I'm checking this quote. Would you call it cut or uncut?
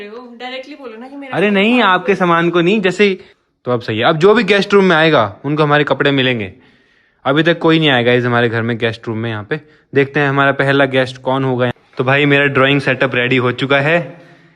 cut